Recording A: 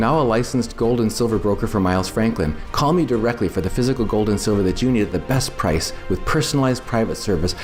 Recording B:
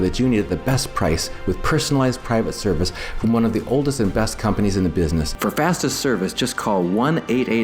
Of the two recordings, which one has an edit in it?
B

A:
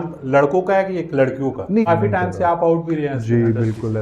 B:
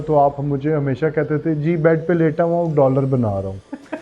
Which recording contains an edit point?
A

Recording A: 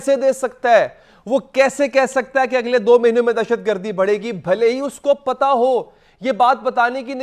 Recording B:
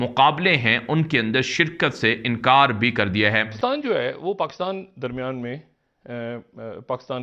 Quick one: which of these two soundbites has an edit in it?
B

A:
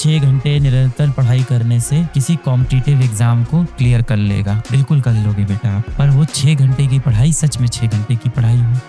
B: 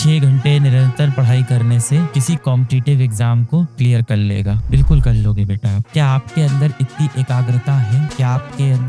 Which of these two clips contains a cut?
B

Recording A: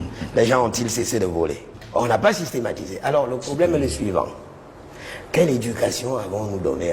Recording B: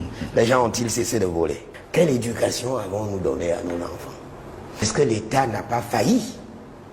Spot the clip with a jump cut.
B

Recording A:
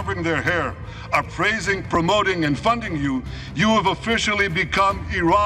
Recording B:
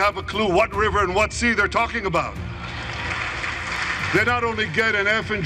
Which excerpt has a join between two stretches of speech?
B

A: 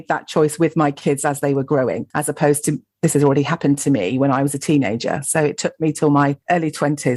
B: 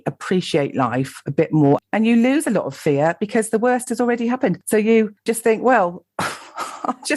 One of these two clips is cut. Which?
B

